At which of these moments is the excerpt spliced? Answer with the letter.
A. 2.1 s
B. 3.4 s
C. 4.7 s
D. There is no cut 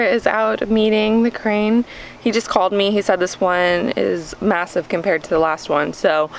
D